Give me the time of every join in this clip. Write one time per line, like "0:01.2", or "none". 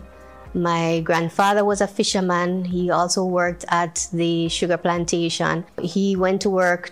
0:05.9